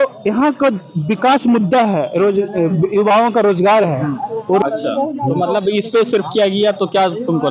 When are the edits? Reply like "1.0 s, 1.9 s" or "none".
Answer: 4.6 s